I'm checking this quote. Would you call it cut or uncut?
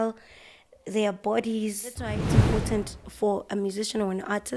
cut